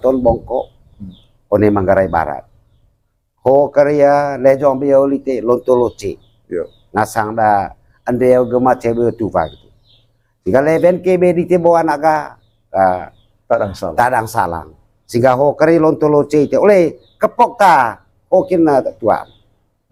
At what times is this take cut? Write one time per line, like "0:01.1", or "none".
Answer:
none

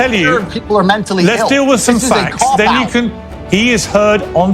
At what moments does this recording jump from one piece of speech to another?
0:03.2

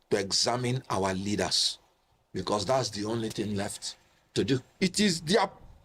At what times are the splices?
0:04.7

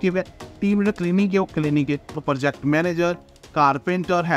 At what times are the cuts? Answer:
0:02.2

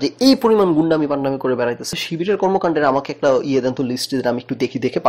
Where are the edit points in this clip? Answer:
0:02.0

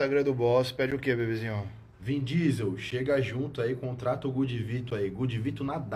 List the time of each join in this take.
none

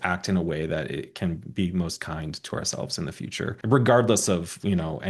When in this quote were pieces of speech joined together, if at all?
0:03.6

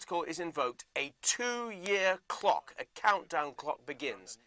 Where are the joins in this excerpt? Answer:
0:02.0

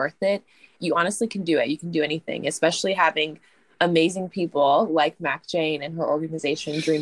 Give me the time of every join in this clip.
none

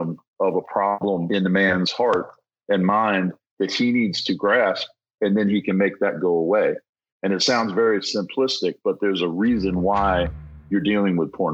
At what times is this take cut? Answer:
0:01.0

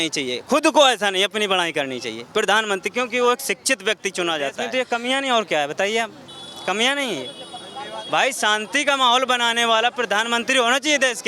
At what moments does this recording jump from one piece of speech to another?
0:04.8

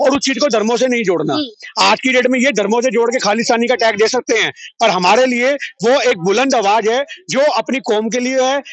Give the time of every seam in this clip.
none

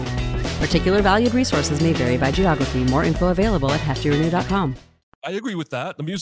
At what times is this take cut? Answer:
0:05.2

